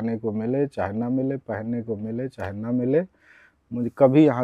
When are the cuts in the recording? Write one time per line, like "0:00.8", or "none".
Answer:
none

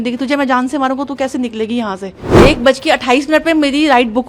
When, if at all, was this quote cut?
0:02.4

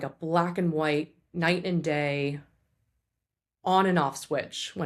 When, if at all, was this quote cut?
none

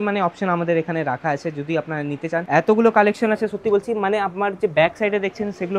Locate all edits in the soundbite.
0:02.4

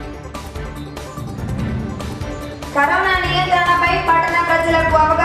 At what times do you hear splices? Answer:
0:02.5

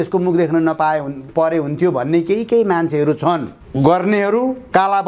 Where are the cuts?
0:03.6

